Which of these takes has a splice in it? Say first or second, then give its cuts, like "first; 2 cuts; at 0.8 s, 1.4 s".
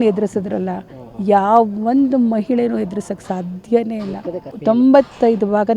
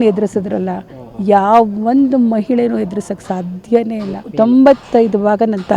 second; 1 cut; at 4.2 s